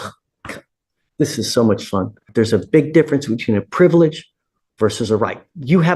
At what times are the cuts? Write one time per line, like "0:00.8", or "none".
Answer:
0:02.3